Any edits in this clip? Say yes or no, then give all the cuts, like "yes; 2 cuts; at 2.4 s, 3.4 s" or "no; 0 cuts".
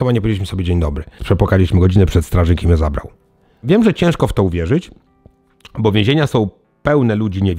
yes; 2 cuts; at 1.2 s, 3.6 s